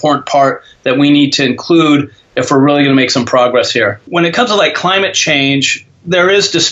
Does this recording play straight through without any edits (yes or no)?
no